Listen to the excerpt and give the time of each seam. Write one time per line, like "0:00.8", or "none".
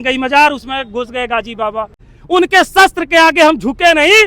0:02.0